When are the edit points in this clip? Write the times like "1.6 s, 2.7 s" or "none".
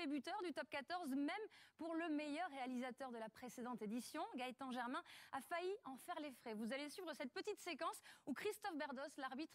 5.2 s